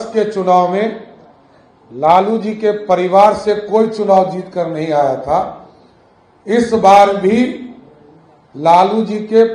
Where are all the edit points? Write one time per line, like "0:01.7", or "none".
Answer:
none